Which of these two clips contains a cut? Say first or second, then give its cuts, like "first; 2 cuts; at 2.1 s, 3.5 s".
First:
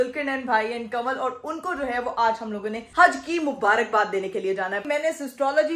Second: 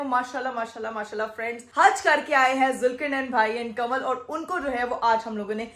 first; 1 cut; at 4.8 s